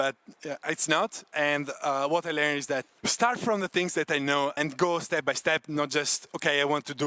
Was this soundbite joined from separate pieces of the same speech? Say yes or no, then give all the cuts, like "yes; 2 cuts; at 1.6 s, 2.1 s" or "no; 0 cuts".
yes; 3 cuts; at 1.3 s, 3.0 s, 4.6 s